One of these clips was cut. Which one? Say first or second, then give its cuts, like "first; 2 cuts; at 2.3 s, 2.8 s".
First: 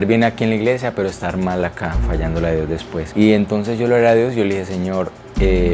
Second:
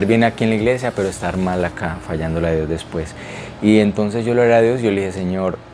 first; 1 cut; at 3.1 s